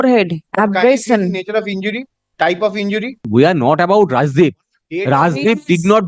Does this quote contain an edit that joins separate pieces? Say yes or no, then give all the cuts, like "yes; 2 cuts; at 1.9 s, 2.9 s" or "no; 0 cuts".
yes; 1 cut; at 3.2 s